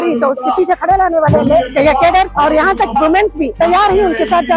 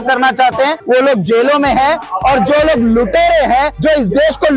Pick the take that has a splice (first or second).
first